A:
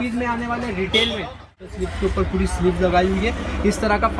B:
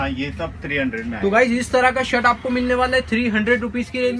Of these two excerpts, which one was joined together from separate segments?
A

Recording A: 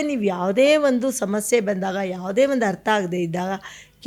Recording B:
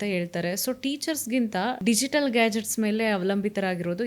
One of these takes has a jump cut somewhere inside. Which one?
B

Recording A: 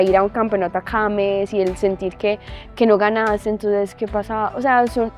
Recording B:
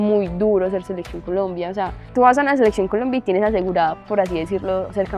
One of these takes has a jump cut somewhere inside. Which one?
B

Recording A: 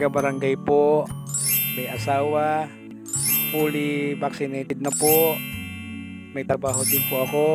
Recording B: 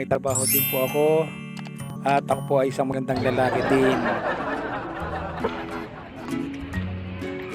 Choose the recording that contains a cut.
B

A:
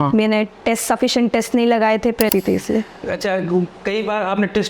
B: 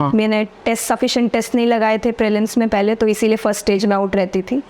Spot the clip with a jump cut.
A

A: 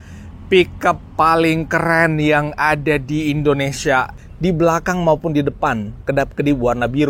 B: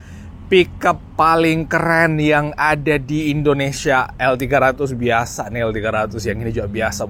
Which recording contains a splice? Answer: A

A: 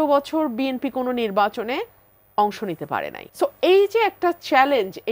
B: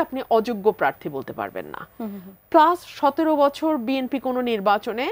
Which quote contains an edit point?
A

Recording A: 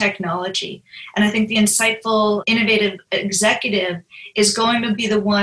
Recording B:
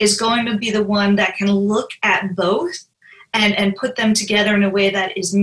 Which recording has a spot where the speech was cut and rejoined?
A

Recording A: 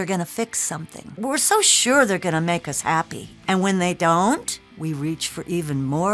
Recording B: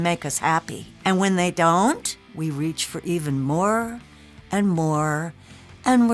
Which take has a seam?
A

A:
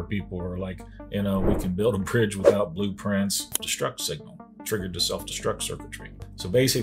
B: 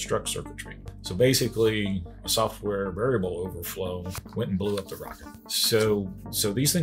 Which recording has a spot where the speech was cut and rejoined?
A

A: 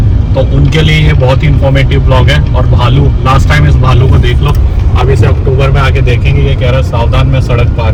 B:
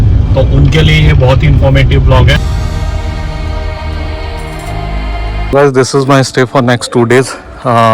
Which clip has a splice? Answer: B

